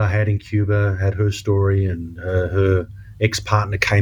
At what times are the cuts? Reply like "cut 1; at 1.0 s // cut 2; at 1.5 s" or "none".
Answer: none